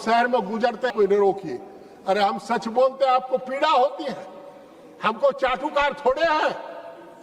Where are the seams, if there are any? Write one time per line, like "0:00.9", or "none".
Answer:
0:00.9